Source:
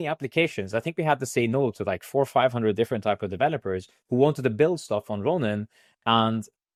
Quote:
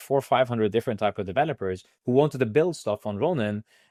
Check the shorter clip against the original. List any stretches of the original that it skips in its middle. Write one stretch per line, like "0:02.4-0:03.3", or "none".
none